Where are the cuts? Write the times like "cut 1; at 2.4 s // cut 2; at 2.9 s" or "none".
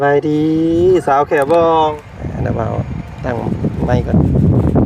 cut 1; at 2.0 s